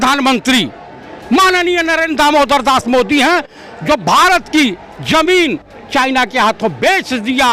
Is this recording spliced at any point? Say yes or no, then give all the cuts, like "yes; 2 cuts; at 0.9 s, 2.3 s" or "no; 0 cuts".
no; 0 cuts